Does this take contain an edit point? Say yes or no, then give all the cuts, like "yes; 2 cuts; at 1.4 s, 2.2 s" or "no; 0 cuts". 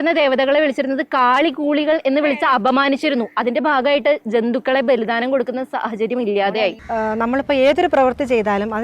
yes; 1 cut; at 6.7 s